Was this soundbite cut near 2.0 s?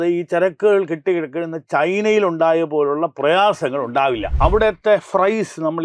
no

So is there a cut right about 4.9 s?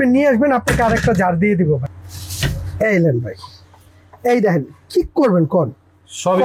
no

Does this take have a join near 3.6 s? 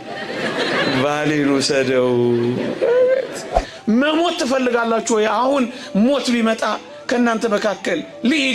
yes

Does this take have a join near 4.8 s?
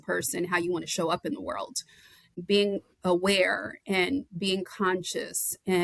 no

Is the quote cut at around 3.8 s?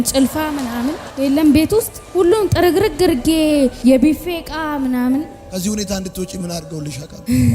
no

